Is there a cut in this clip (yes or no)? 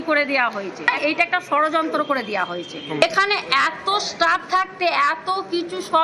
yes